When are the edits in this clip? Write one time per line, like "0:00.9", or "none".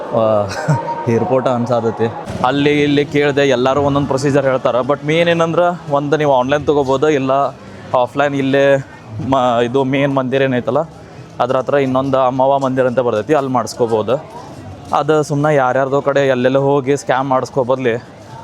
0:02.2